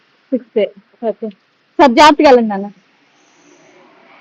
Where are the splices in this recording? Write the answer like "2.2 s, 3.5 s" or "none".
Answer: none